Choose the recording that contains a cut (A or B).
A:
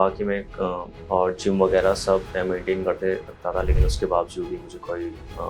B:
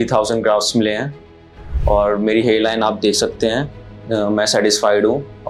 A